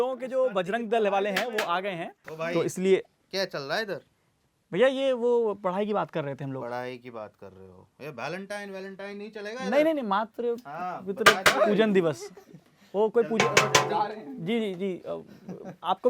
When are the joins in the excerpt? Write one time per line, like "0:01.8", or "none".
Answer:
0:02.3